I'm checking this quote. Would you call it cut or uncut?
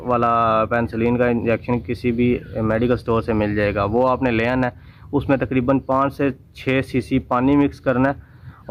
uncut